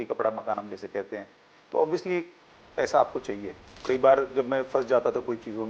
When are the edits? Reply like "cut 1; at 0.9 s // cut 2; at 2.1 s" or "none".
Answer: cut 1; at 3.7 s

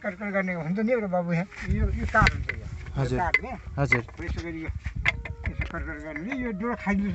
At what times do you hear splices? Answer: cut 1; at 1.6 s

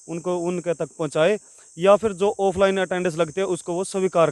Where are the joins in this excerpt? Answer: none

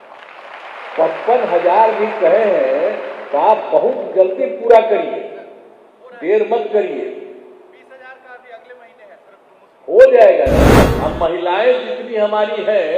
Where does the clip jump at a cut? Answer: cut 1; at 10.8 s

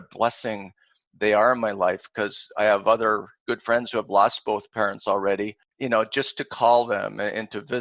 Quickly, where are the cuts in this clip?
cut 1; at 5.6 s

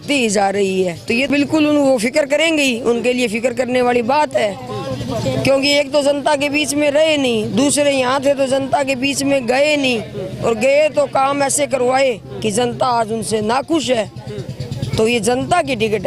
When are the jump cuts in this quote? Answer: cut 1; at 1.3 s

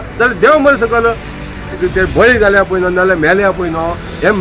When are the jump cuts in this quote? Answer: cut 1; at 1.8 s

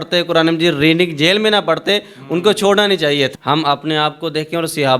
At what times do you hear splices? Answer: cut 1; at 3.3 s

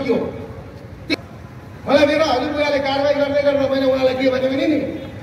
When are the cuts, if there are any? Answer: cut 1; at 1.1 s

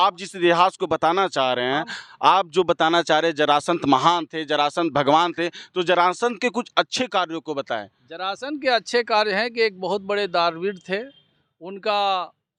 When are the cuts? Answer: none

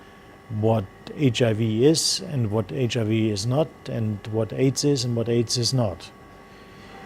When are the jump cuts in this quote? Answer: cut 1; at 2.1 s

